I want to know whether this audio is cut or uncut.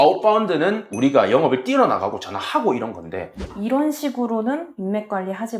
cut